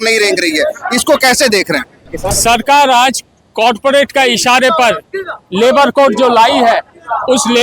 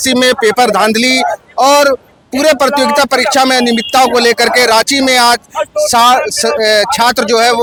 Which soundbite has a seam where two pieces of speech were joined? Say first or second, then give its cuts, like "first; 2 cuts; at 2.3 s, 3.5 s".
first; 1 cut; at 2.3 s